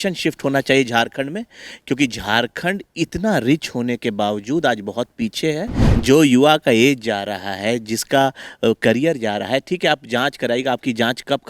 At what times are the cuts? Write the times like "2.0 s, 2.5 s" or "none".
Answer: 5.8 s